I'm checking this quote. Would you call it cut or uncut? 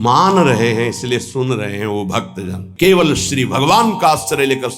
cut